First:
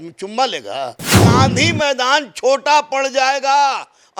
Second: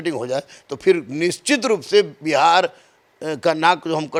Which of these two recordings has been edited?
first; 1 cut; at 1.1 s

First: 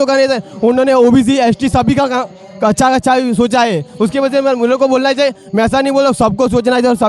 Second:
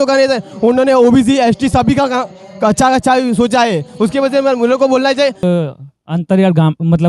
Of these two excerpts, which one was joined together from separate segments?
second; 1 cut; at 5.4 s

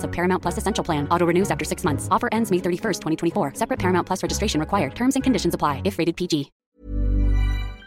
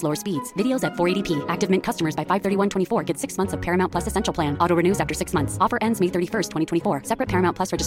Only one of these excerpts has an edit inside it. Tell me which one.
first; 1 cut; at 6.6 s

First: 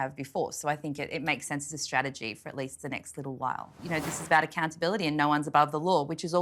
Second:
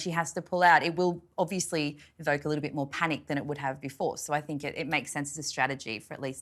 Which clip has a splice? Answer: first; 1 cut; at 3.7 s

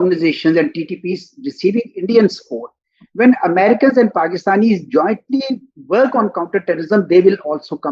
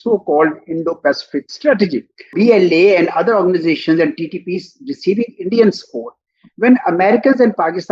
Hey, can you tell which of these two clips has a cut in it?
second; 1 cut; at 2.3 s

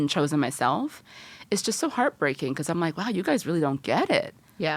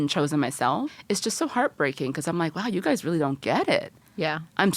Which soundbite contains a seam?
second; 1 cut; at 1.0 s

